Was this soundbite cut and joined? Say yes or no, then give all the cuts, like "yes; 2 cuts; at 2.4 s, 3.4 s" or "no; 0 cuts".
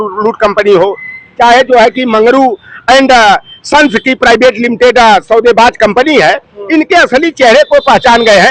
no; 0 cuts